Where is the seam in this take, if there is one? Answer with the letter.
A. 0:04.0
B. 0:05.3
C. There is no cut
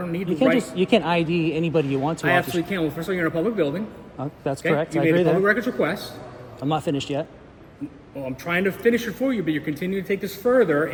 C